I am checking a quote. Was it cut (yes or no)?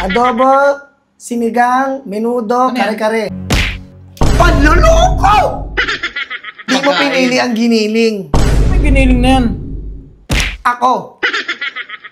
yes